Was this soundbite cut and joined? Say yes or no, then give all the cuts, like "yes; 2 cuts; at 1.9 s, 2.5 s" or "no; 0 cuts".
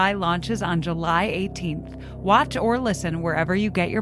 no; 0 cuts